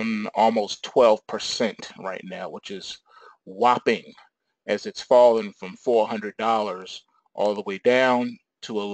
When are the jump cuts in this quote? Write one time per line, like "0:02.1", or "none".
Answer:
0:05.1

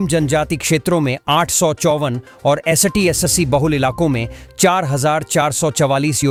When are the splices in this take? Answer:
none

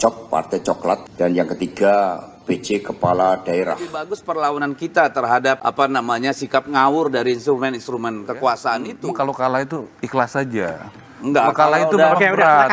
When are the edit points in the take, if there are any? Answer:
0:01.1
0:04.2
0:05.6
0:09.0

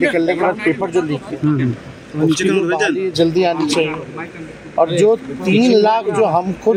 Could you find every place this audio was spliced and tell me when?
none

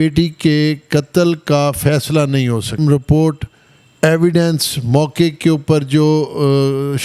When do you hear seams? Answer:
0:02.8

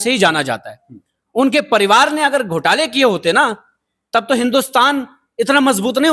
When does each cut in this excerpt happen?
none

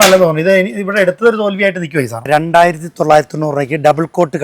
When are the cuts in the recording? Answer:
0:02.3

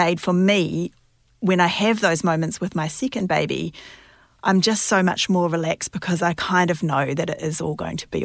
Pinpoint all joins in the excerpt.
none

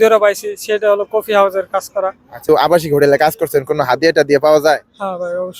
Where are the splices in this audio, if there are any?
0:02.4

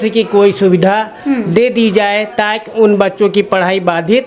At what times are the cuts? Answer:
none

